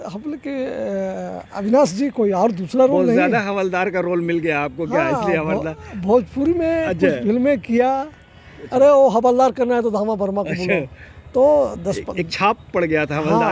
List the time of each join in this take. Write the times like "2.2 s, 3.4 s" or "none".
none

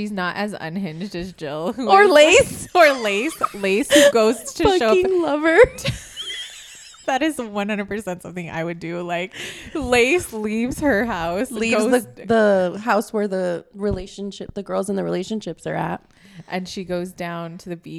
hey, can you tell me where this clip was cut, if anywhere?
none

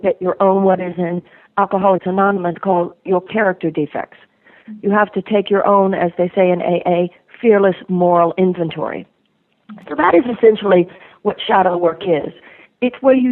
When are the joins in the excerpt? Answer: none

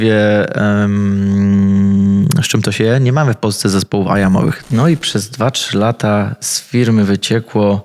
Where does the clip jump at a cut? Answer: 4.6 s

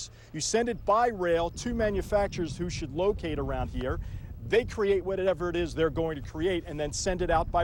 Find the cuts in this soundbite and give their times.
none

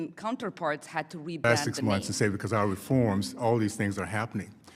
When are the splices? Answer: 1.4 s

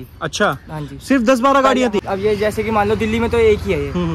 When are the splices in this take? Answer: 2.0 s

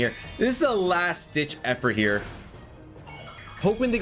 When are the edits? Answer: none

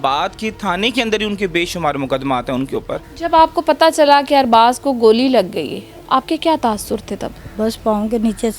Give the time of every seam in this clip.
3.0 s, 7.4 s

